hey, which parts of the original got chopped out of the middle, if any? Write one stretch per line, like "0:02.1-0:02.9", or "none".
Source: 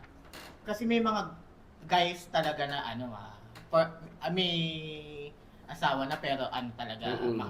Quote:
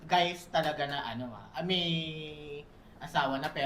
0:03.2-0:04.1